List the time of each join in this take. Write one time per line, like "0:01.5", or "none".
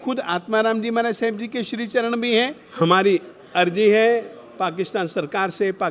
0:02.6